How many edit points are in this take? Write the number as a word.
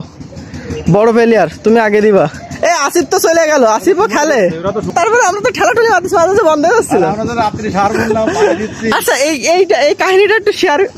one